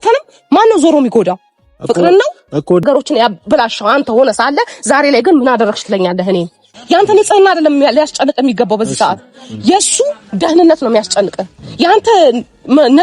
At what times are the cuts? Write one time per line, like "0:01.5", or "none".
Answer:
0:02.8
0:06.7